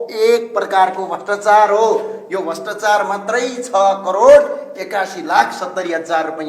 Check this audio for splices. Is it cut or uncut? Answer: uncut